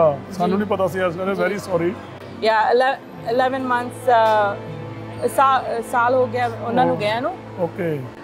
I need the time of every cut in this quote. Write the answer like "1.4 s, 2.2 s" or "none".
none